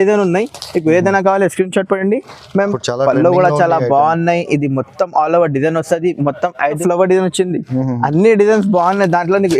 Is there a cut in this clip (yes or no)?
yes